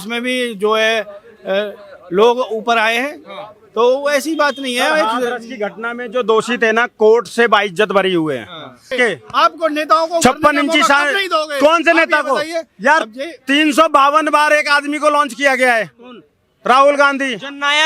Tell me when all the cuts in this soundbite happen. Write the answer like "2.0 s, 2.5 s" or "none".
8.9 s

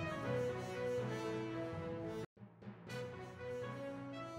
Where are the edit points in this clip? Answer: none

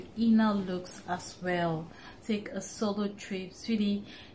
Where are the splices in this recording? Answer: 2.1 s

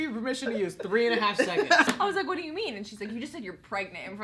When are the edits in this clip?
1.9 s

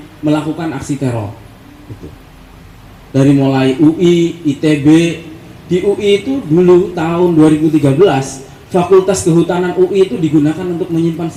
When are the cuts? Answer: none

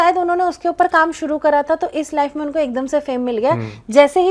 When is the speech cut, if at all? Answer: none

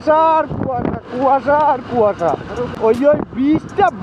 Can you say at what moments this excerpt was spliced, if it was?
2.7 s

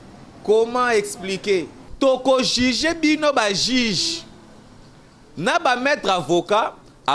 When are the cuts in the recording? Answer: 1.8 s

